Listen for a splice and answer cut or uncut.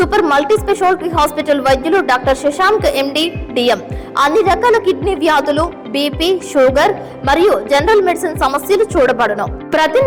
uncut